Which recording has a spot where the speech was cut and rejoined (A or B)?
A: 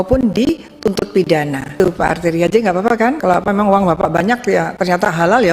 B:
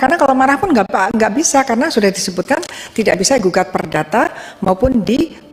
A